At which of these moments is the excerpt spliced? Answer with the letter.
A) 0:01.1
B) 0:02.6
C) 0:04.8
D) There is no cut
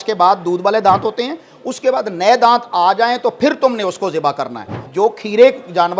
C